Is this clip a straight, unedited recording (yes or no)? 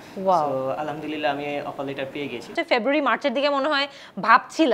no